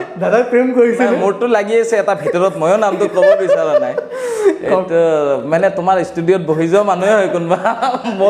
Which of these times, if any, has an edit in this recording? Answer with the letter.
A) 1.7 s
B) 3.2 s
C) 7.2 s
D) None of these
D